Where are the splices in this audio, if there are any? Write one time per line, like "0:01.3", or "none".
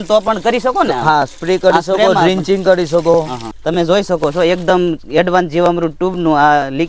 0:03.5